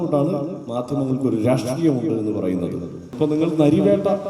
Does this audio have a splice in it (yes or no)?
yes